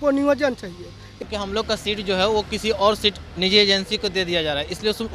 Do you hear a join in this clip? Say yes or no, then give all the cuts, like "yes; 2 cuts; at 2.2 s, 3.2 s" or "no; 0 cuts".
yes; 1 cut; at 1.1 s